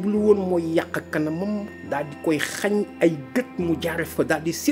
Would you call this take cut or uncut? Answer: uncut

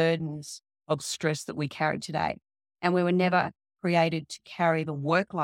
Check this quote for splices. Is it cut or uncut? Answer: uncut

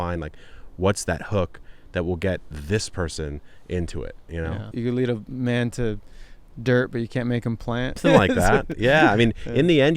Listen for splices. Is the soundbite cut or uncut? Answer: cut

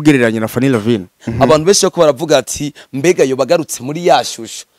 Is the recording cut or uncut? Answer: cut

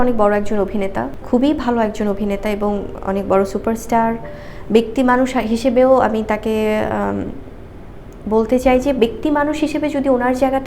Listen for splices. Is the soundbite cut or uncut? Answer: cut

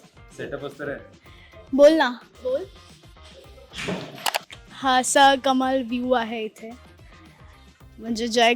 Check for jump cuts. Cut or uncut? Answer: cut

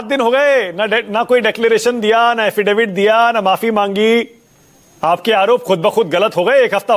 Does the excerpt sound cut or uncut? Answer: uncut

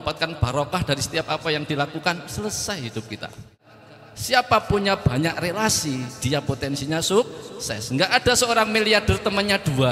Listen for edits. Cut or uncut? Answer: cut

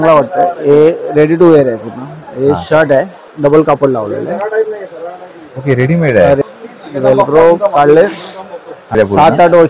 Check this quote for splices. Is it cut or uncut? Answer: cut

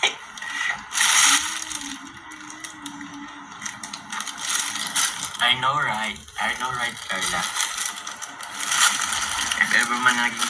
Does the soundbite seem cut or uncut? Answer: uncut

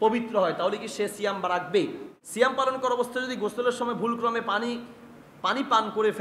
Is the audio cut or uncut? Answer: cut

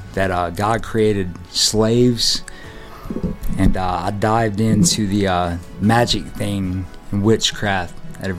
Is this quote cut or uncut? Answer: uncut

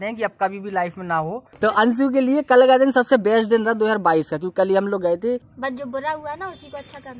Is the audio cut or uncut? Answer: cut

